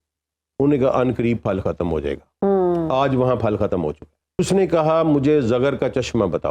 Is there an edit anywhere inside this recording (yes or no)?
yes